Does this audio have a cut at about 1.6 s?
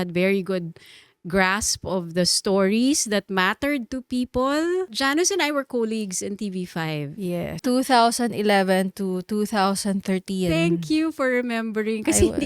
no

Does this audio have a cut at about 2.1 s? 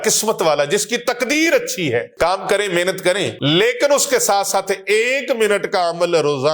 yes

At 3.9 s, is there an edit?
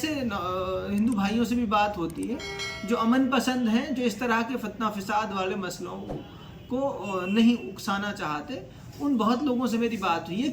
no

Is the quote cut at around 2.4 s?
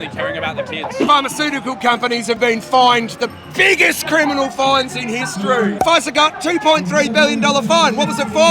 yes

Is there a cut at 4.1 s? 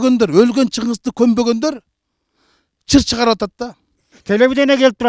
yes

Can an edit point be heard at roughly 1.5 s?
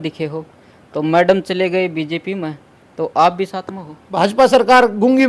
no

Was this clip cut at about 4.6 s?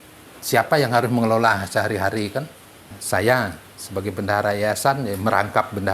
no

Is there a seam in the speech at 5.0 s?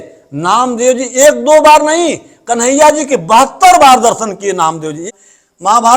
yes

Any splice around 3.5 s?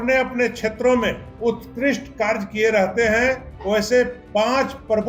yes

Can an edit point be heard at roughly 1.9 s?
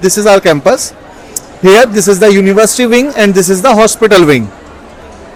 no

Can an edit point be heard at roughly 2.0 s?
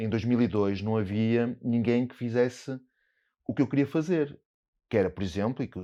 no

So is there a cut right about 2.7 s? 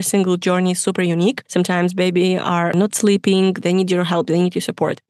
yes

